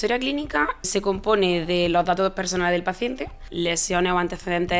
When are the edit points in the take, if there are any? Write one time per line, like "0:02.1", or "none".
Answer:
0:00.9
0:03.5